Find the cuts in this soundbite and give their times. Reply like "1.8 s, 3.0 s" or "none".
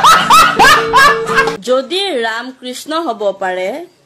1.5 s